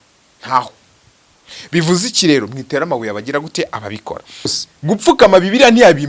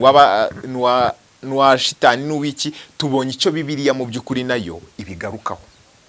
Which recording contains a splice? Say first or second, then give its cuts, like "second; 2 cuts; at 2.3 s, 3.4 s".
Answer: first; 1 cut; at 4.7 s